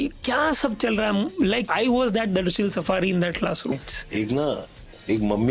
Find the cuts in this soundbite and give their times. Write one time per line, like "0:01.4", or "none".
0:01.6
0:03.7